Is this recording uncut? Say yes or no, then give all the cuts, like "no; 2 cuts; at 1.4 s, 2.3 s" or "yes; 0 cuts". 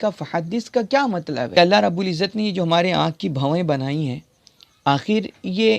no; 1 cut; at 1.6 s